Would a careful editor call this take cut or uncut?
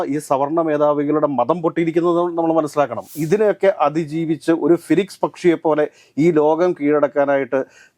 cut